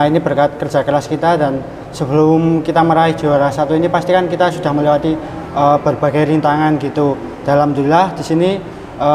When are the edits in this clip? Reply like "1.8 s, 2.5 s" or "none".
none